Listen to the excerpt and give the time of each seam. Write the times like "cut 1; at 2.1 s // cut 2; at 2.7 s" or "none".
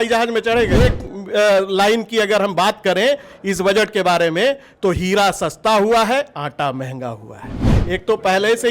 cut 1; at 0.8 s // cut 2; at 7.7 s